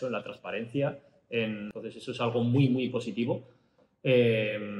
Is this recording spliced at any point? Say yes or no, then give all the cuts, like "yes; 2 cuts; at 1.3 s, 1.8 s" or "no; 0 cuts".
yes; 1 cut; at 1.7 s